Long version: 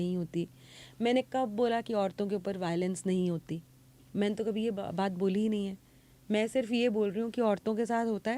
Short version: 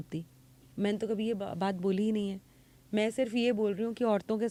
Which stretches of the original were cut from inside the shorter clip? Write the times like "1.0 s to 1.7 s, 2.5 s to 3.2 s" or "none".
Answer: none